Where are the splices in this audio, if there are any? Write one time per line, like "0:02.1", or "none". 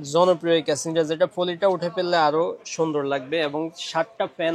none